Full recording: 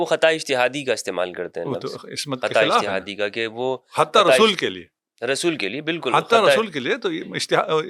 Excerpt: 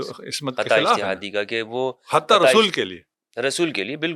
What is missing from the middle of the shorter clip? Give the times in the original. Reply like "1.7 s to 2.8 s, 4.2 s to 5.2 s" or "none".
none